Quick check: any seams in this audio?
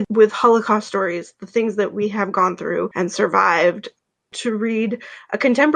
no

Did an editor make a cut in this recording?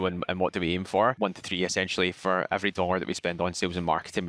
yes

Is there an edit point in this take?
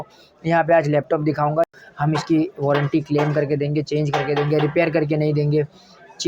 yes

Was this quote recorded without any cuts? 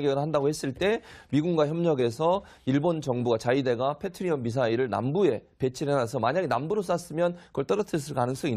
yes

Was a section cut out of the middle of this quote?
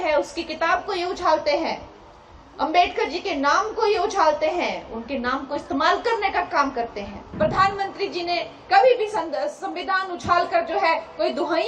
yes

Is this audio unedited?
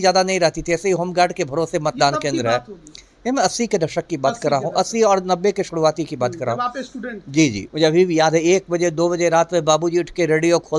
no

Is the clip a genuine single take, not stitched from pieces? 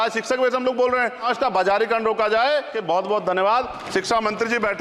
no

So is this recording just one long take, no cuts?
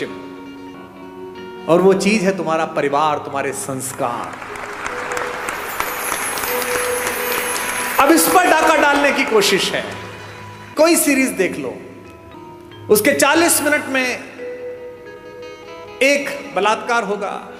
yes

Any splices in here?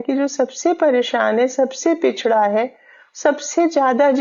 no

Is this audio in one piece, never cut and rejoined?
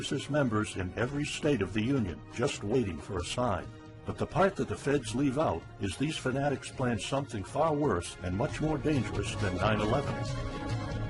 no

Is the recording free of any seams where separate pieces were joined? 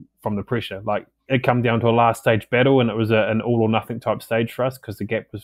no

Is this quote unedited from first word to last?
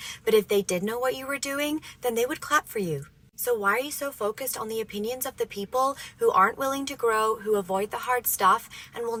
yes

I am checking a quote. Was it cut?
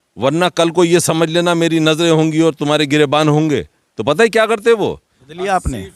no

